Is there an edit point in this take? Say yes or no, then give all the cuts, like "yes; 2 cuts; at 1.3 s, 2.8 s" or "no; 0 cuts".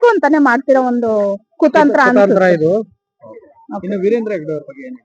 no; 0 cuts